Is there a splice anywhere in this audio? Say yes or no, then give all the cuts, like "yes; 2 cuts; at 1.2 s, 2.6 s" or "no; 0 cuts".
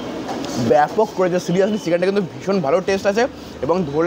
no; 0 cuts